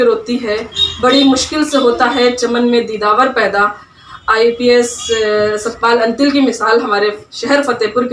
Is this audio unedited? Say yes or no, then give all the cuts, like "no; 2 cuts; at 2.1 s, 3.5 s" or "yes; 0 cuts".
yes; 0 cuts